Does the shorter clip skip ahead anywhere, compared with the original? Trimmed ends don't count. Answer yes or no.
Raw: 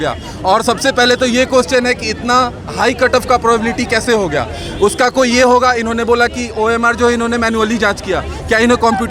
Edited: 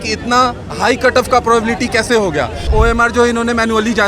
yes